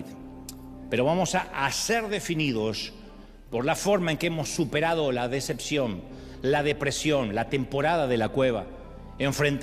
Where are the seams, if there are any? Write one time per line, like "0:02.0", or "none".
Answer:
none